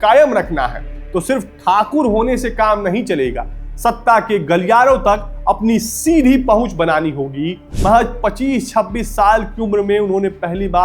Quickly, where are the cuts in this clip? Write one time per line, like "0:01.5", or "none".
0:07.6

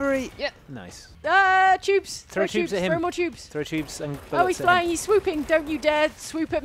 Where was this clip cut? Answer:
0:01.1

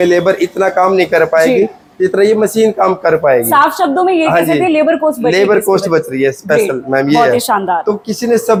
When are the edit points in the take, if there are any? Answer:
none

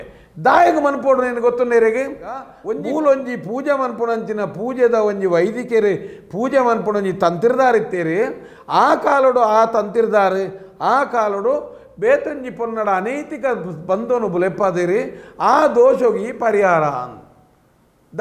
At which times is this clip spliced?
0:02.5

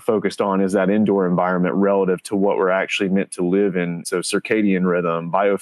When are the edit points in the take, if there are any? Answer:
0:04.0

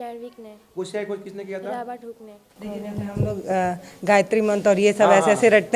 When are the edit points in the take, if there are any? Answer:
0:02.5

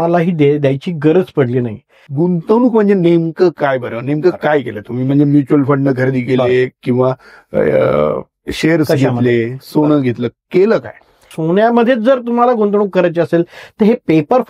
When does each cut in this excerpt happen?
0:02.0
0:11.3

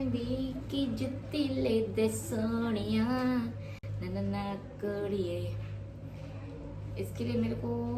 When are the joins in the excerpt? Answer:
none

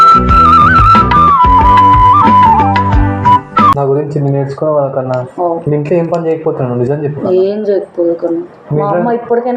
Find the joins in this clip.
0:03.8

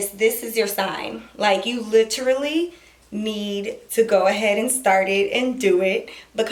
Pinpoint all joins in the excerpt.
none

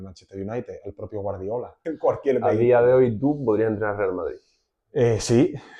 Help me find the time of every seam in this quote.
0:01.8

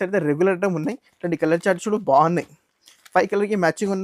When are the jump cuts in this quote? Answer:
none

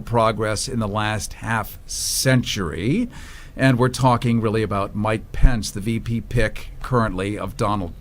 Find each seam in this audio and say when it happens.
0:05.3

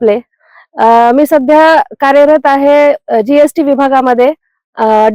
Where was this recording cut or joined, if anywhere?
none

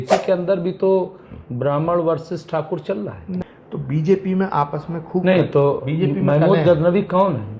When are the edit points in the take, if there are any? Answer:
0:03.4

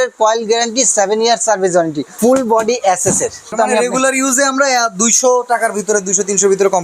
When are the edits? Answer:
0:02.0
0:03.5

